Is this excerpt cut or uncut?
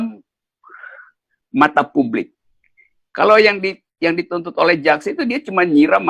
uncut